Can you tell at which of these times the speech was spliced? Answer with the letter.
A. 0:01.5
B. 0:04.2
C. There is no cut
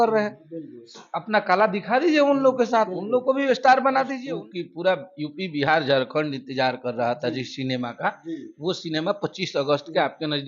B